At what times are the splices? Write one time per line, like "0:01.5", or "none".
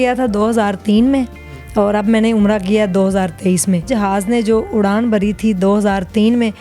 0:03.9